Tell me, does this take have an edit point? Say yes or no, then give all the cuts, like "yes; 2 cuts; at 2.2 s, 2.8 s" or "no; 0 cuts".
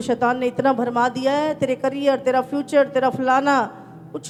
no; 0 cuts